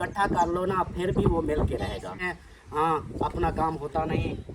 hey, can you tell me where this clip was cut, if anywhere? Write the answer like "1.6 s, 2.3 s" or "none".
2.2 s